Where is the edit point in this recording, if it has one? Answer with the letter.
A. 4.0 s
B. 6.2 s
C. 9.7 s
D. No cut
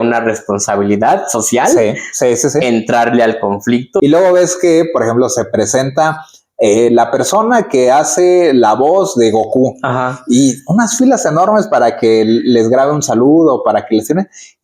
A